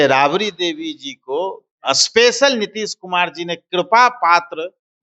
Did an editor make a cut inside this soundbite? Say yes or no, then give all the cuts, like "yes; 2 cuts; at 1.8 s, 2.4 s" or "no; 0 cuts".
no; 0 cuts